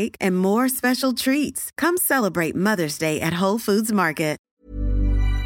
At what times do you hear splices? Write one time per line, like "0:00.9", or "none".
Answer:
0:04.4